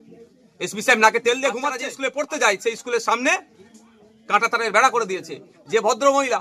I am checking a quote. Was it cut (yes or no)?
yes